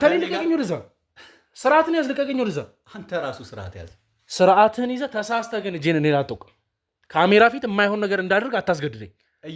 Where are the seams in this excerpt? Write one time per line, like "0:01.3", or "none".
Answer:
none